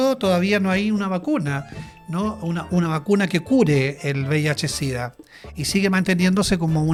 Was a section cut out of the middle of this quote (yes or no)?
no